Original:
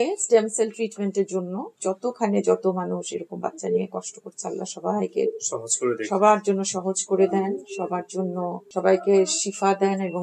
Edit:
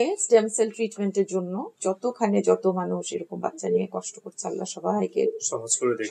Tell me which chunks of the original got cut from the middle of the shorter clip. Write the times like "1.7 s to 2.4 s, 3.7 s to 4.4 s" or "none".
none